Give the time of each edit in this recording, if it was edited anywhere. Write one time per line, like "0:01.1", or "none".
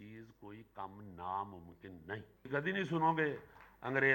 0:02.5